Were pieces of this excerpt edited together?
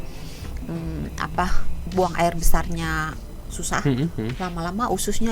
no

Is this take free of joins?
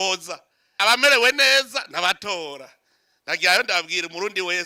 yes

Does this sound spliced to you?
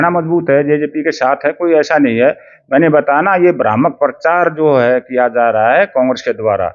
no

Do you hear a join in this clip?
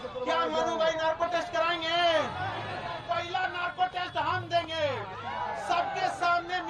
no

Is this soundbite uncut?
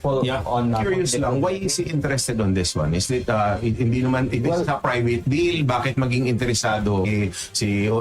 no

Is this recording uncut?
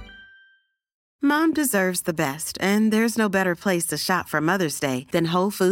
no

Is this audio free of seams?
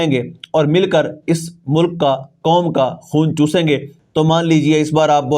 no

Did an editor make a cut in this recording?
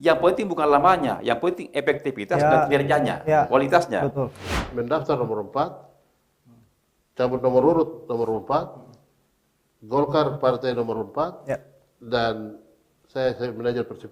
yes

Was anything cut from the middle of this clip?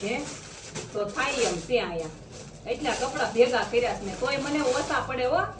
no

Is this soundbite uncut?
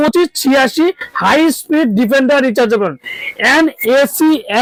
yes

